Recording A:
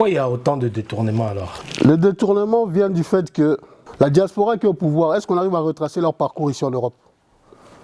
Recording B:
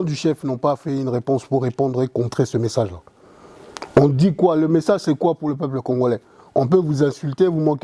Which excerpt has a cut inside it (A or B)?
A